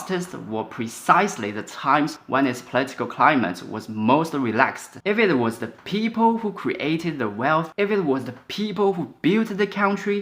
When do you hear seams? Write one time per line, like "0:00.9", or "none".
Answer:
0:04.9